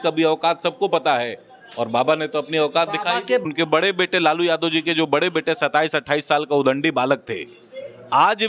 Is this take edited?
yes; 1 cut; at 3.4 s

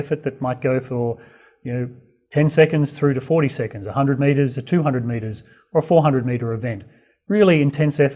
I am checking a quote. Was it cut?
yes; 1 cut; at 4.8 s

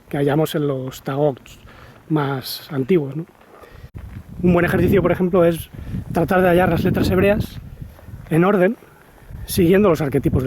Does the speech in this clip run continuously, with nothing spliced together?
no; 1 cut; at 3.9 s

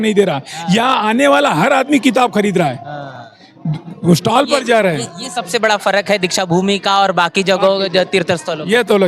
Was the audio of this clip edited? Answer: no; 0 cuts

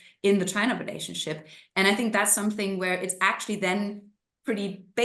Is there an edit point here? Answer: no; 0 cuts

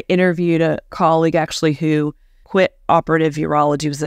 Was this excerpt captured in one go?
no; 1 cut; at 0.9 s

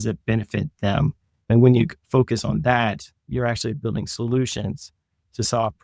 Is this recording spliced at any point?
yes; 1 cut; at 3.3 s

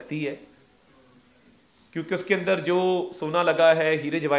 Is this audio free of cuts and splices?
yes; 0 cuts

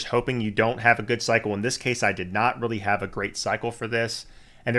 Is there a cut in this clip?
no; 0 cuts

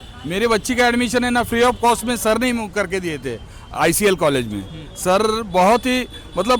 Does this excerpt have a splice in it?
no; 0 cuts

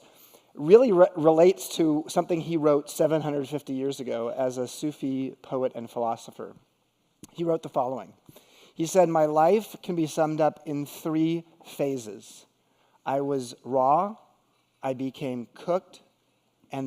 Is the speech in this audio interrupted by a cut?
yes; 1 cut; at 11.1 s

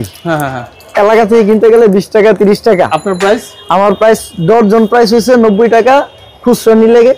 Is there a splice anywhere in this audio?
no; 0 cuts

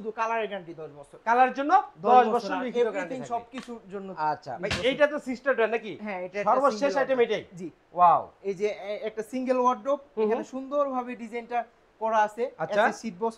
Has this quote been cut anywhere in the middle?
no; 0 cuts

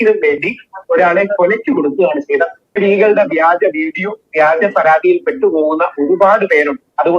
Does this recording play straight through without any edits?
no; 1 cut; at 2.6 s

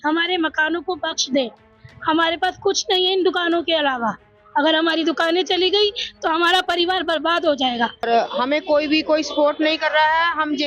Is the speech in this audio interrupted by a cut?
yes; 1 cut; at 8.1 s

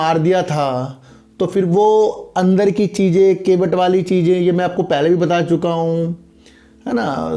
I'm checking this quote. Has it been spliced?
no; 0 cuts

